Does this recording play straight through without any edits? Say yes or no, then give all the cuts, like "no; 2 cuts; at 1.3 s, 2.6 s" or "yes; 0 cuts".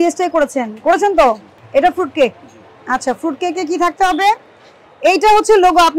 no; 1 cut; at 1.5 s